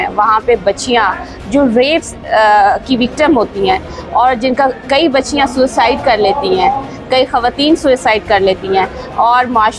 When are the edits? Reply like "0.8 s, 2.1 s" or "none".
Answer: none